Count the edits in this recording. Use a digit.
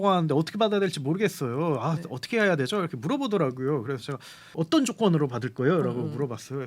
1